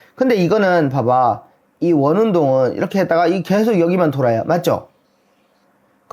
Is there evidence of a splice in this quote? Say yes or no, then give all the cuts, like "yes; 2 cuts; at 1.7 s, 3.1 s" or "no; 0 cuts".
no; 0 cuts